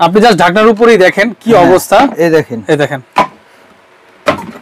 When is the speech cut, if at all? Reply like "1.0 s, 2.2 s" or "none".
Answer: none